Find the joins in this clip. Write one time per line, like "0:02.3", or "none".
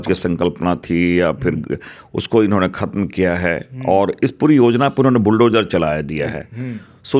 none